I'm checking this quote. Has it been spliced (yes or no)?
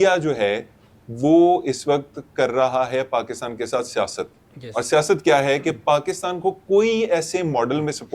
no